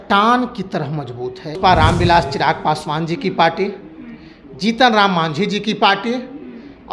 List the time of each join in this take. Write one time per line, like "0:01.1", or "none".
0:01.6